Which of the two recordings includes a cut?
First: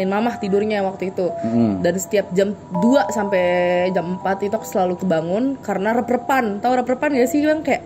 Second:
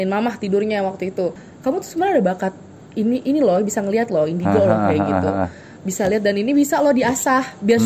second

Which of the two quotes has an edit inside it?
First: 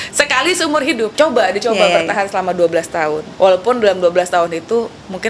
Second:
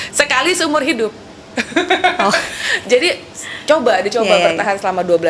first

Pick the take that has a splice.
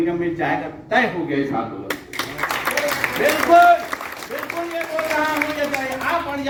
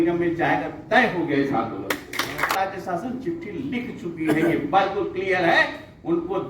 second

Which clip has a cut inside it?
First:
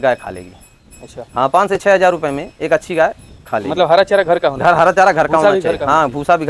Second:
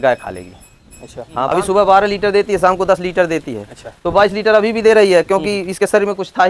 second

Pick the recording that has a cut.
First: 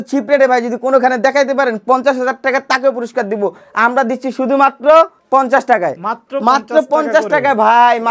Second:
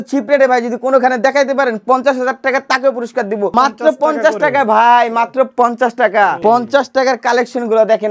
second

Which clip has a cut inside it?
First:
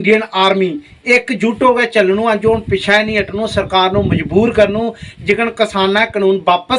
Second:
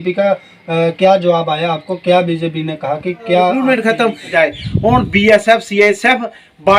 second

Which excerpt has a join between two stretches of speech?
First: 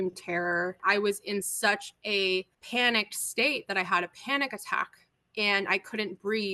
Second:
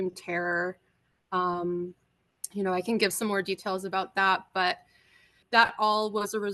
first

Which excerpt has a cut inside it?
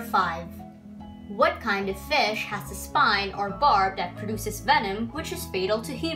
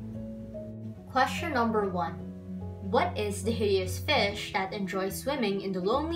second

